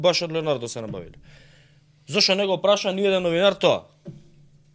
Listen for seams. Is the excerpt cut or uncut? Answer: uncut